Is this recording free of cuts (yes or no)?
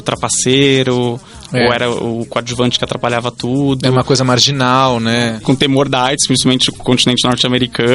no